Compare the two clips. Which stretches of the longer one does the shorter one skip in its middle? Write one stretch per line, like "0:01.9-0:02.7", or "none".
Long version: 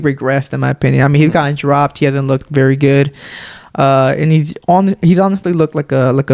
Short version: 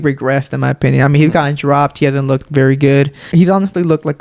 0:03.3-0:05.0